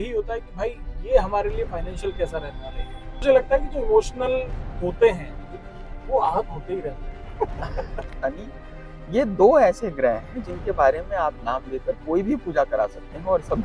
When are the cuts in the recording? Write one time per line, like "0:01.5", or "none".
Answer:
0:03.2
0:08.1